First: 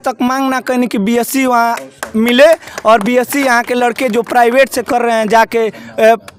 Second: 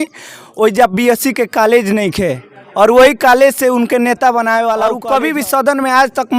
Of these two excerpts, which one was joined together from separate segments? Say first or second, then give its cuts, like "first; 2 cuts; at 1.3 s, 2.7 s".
second; 1 cut; at 5.0 s